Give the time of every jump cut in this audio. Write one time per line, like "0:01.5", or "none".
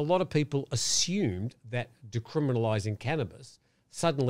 none

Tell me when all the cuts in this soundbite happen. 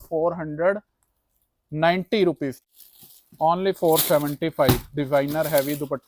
0:02.6

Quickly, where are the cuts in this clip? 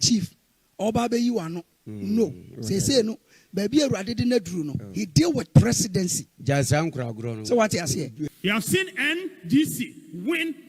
0:08.3

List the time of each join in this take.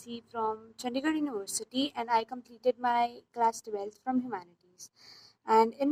none

